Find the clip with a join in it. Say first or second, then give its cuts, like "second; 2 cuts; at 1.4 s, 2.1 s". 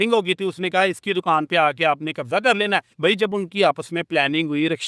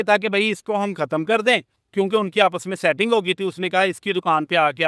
first; 1 cut; at 2.9 s